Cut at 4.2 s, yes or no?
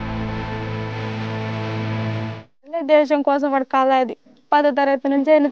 no